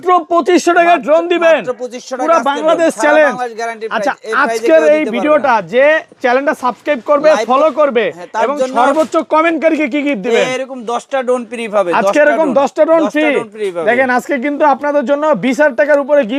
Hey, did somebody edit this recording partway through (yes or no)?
no